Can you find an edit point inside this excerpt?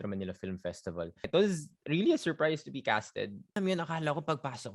yes; 2 cuts; at 1.3 s, 3.5 s

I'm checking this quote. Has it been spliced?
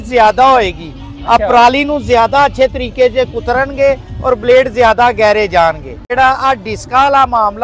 yes; 1 cut; at 6.0 s

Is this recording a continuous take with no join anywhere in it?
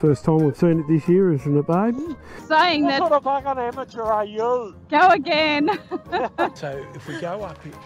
no; 2 cuts; at 2.3 s, 6.5 s

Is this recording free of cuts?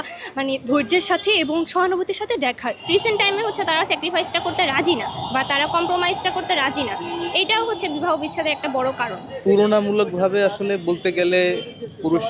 no; 2 cuts; at 2.8 s, 9.3 s

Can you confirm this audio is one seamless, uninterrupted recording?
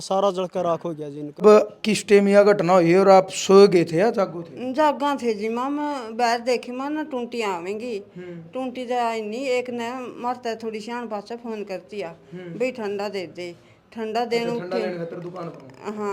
no; 1 cut; at 1.4 s

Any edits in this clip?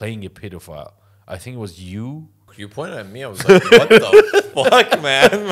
yes; 1 cut; at 2.5 s

